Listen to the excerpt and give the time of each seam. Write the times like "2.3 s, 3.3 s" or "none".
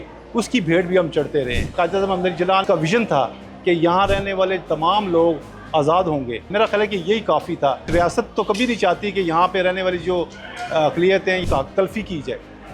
1.7 s, 2.6 s, 6.5 s, 7.9 s, 11.4 s